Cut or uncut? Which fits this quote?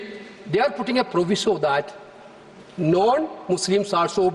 uncut